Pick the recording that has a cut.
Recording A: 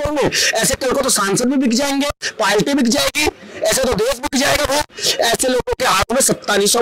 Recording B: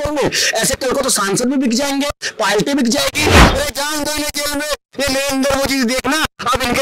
B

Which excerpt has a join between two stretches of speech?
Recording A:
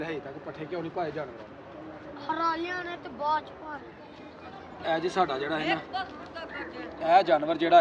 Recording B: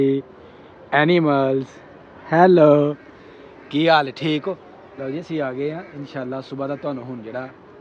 A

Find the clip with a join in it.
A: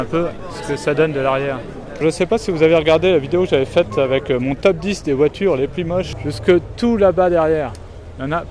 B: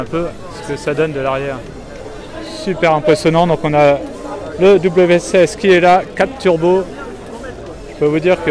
A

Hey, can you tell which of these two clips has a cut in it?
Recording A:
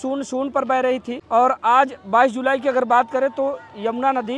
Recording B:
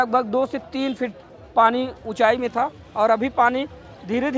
A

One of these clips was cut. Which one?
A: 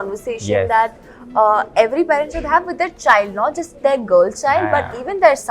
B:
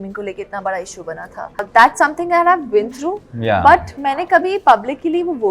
B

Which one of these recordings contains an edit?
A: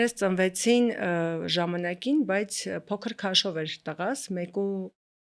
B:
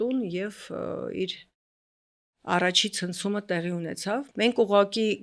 B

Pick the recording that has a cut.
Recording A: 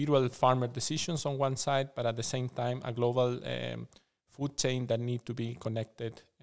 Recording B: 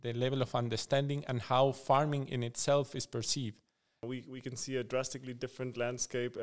B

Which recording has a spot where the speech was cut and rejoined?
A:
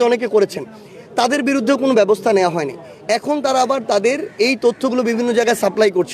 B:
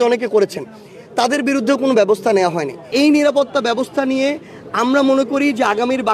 B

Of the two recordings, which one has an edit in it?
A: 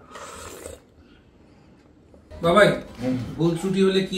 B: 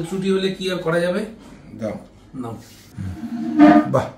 A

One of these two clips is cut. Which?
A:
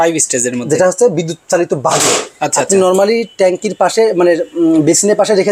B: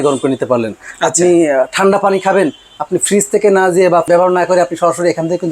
B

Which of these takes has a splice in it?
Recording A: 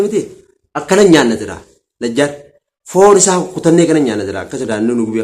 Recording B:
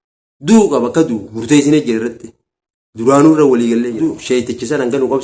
B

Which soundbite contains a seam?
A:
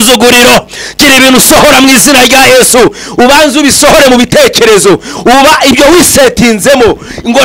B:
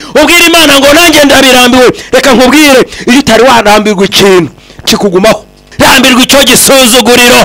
B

